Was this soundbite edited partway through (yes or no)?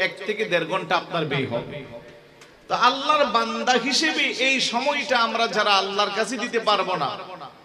no